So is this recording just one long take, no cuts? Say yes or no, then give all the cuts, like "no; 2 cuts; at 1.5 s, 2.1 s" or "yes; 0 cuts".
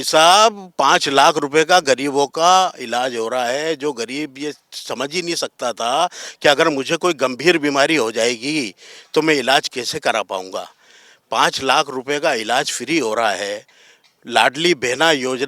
yes; 0 cuts